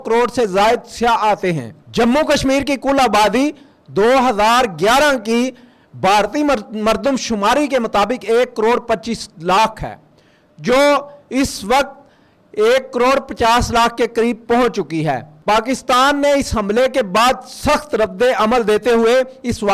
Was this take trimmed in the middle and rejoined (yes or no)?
no